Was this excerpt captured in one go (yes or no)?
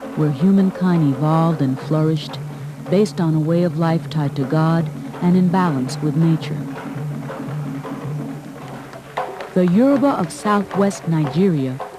no